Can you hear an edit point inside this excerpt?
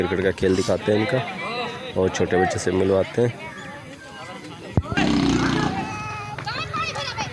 yes; 1 cut; at 5.0 s

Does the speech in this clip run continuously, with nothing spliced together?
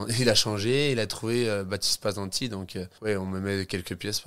yes; 0 cuts

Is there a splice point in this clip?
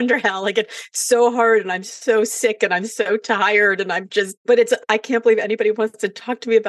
yes; 1 cut; at 4.4 s

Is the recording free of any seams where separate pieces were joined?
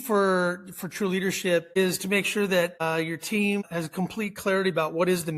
no; 3 cuts; at 1.7 s, 2.8 s, 3.7 s

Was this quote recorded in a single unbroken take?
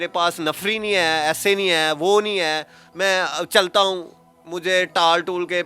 yes; 0 cuts

